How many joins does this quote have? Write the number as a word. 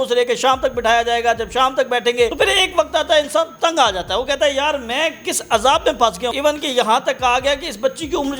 two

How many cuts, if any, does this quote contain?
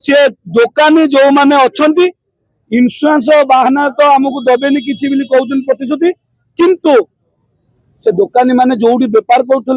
zero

